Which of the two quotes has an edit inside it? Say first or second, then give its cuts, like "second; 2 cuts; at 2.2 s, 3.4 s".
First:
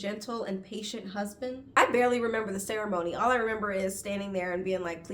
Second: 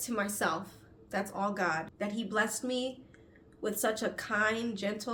first; 1 cut; at 1.6 s